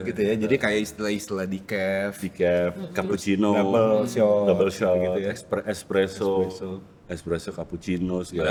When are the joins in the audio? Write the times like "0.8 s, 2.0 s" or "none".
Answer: none